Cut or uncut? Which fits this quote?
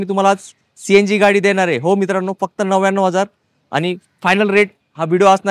uncut